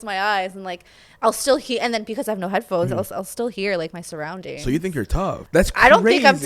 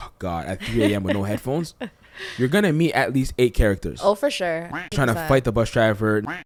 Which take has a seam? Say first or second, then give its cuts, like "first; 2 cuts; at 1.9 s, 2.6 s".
first; 1 cut; at 5.4 s